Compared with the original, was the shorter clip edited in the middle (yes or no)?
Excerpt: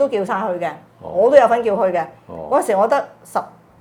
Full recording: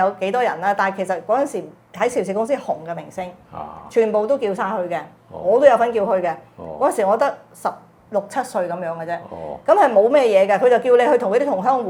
no